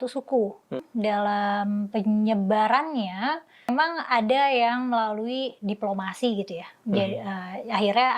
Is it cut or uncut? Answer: cut